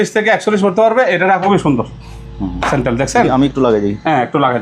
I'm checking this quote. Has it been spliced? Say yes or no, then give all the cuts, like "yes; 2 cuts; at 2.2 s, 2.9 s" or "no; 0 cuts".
yes; 1 cut; at 1.4 s